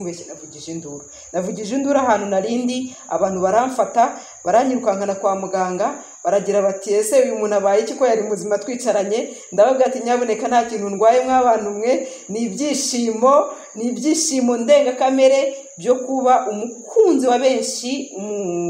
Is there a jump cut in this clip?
no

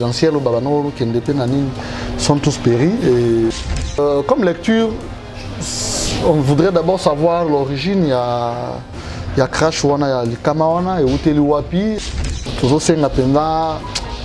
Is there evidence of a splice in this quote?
yes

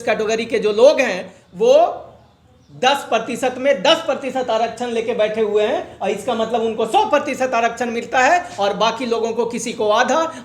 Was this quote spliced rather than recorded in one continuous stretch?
no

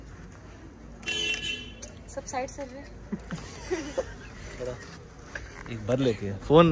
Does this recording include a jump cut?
no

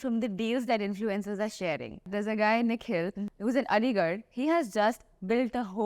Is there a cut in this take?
yes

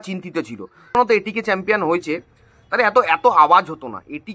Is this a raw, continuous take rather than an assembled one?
no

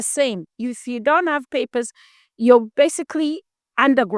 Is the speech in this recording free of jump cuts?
yes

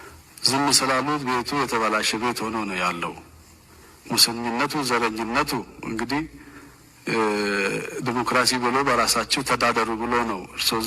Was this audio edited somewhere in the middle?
no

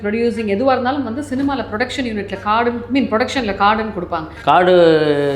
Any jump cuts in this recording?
yes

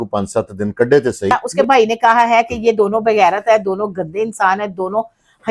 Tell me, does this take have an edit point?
yes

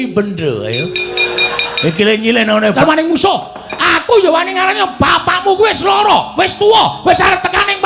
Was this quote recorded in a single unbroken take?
no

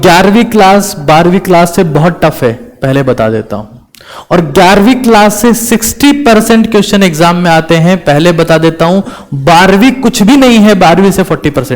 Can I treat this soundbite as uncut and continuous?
yes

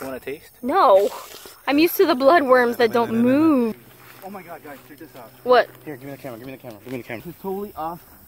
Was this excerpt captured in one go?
no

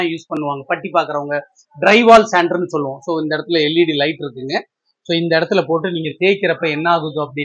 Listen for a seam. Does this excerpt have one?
no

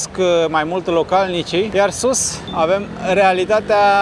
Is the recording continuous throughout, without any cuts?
no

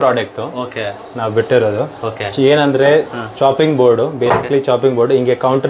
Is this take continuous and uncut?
yes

